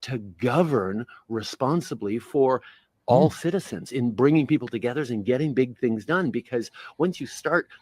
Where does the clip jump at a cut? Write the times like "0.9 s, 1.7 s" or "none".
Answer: 4.2 s